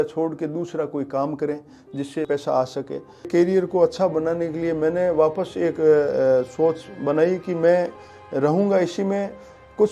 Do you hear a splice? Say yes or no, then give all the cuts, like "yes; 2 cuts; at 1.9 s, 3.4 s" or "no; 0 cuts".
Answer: yes; 2 cuts; at 2.3 s, 3.3 s